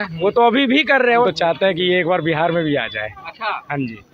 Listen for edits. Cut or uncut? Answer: cut